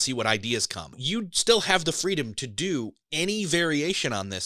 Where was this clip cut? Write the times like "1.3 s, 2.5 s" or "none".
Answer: 1.0 s